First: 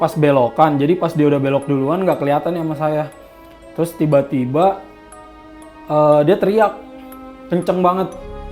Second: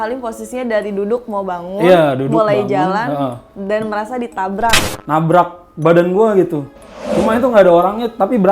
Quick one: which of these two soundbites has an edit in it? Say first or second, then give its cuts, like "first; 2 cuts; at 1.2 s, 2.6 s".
second; 1 cut; at 4.8 s